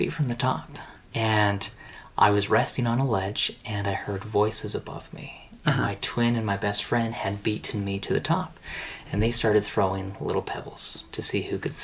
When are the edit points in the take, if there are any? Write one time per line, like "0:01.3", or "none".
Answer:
0:01.0